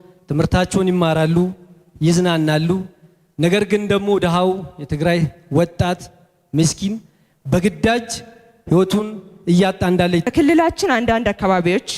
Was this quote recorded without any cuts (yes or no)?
no